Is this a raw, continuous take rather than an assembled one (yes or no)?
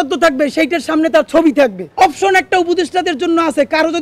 no